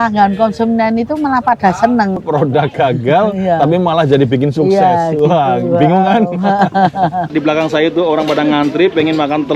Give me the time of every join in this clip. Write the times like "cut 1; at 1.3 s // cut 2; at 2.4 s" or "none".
cut 1; at 2.2 s // cut 2; at 7.3 s